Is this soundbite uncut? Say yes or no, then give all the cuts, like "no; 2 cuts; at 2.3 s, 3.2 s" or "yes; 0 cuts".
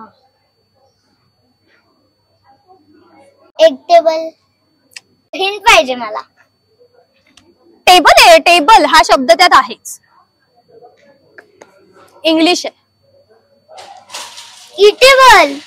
no; 2 cuts; at 3.5 s, 5.4 s